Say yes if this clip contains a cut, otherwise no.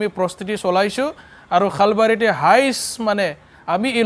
no